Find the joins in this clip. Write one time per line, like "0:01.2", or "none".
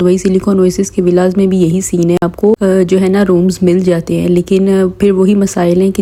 none